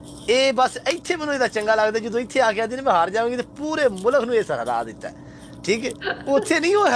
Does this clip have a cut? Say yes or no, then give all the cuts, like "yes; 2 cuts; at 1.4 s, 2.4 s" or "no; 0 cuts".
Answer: no; 0 cuts